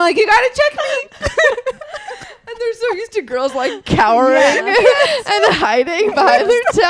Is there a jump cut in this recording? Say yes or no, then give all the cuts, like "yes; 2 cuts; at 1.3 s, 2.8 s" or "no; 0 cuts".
no; 0 cuts